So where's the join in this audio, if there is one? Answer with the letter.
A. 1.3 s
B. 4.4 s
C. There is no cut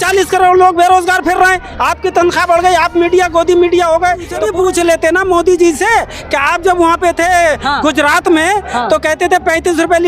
B